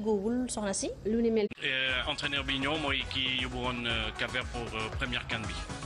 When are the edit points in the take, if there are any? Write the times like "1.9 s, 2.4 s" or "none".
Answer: none

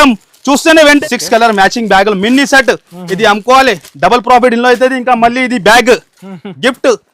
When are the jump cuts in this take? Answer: 1.0 s

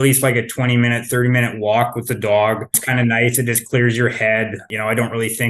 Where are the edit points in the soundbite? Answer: 2.8 s, 4.7 s

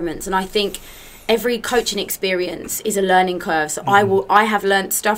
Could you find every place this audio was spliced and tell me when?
none

